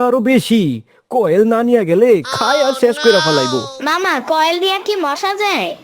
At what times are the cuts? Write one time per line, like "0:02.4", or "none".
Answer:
0:03.7